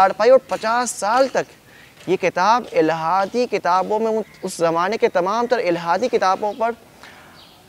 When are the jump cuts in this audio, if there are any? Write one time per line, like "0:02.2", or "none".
none